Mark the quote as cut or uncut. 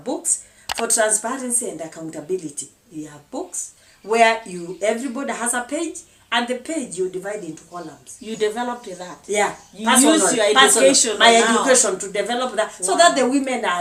uncut